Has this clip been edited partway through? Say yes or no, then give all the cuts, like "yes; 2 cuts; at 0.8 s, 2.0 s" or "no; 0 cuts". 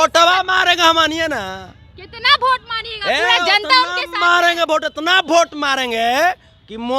no; 0 cuts